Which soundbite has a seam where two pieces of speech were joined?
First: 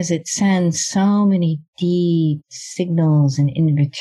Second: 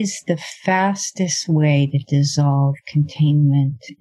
first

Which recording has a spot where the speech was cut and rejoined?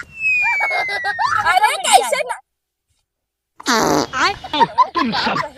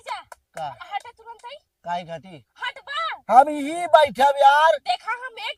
first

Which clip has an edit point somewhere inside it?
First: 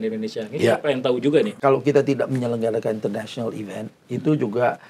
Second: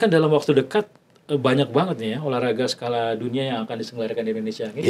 first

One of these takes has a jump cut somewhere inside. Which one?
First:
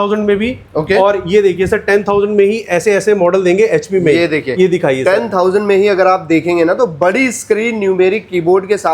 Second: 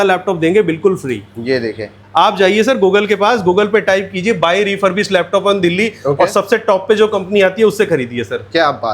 second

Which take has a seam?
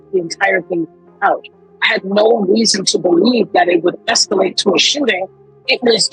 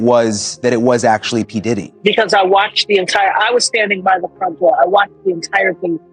second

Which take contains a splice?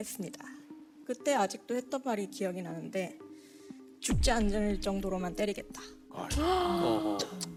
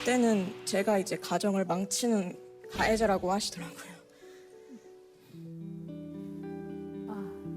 second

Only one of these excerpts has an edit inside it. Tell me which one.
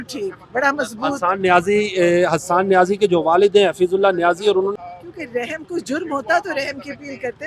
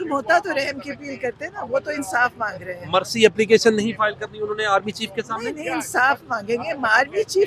first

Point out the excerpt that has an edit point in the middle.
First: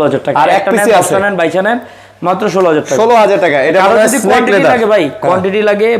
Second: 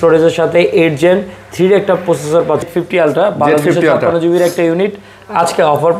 second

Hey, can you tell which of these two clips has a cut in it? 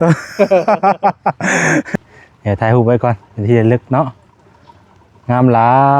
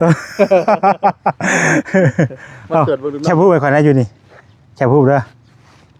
first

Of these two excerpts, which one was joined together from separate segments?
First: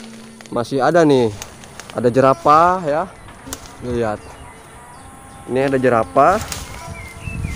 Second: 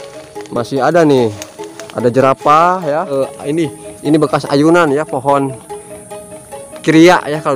second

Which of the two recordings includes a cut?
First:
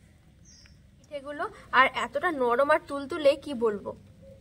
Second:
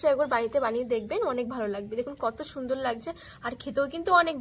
first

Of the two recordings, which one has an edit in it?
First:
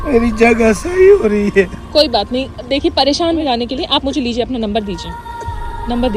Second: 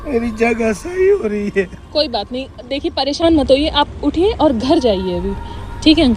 first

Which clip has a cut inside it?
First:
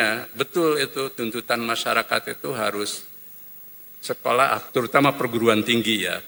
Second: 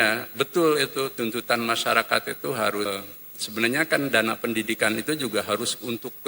second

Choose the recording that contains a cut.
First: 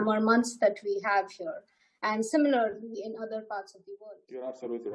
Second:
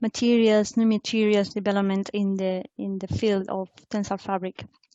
first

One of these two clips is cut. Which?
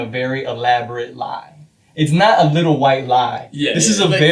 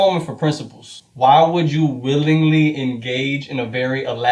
second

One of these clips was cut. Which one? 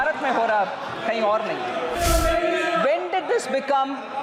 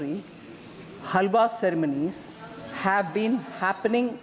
first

